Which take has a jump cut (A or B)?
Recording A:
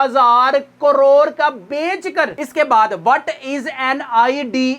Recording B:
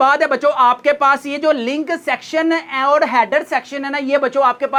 A